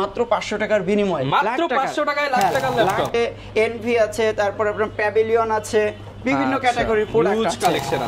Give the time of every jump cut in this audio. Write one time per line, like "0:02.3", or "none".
0:03.1